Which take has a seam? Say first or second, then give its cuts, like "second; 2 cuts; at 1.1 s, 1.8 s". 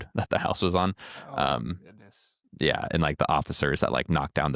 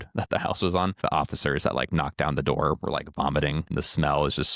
second; 2 cuts; at 1.0 s, 3.7 s